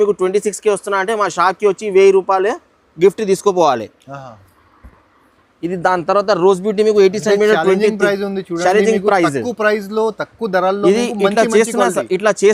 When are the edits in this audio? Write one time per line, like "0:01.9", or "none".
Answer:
none